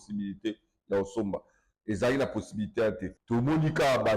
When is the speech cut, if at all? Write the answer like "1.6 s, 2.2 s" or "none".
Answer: 3.1 s